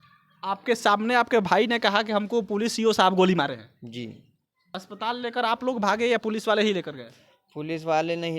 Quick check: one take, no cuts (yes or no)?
no